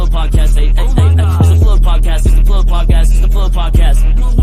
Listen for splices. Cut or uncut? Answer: uncut